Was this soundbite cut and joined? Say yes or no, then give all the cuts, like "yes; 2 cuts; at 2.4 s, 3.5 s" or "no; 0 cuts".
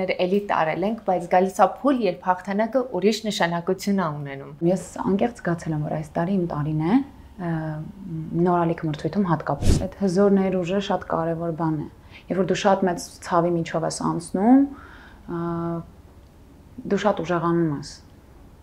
yes; 2 cuts; at 4.6 s, 9.8 s